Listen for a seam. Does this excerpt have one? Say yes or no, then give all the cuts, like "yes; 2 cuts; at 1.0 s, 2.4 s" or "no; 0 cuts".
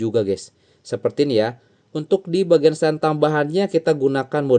no; 0 cuts